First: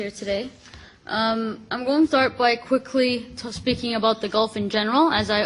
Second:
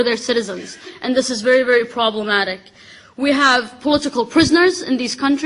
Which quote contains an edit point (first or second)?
second